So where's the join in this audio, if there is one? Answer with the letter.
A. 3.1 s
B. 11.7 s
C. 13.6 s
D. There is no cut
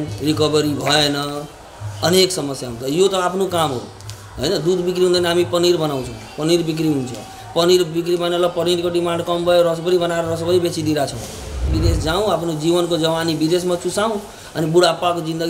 B